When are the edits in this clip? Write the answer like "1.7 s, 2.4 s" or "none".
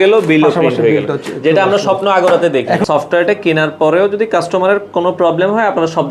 2.8 s